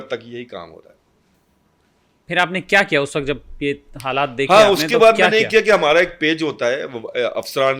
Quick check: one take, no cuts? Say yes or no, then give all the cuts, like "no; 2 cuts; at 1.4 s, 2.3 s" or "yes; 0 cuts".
yes; 0 cuts